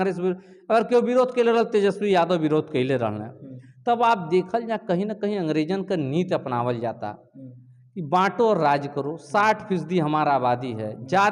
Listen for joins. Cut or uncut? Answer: uncut